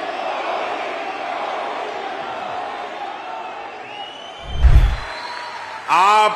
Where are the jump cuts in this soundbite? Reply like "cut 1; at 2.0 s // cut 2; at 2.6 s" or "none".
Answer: cut 1; at 4.6 s